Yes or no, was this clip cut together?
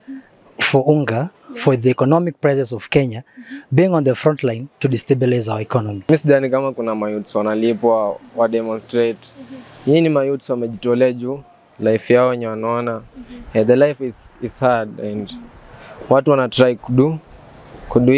yes